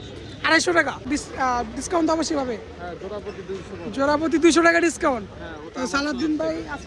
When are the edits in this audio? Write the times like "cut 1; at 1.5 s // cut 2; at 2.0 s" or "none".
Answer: cut 1; at 1.1 s